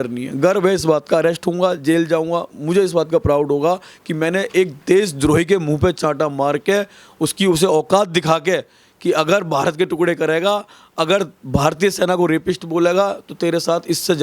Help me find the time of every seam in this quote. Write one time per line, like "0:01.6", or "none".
none